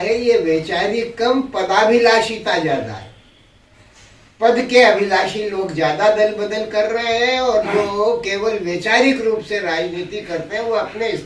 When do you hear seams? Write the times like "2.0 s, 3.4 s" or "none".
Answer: none